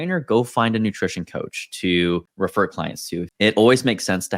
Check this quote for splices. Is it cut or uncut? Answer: cut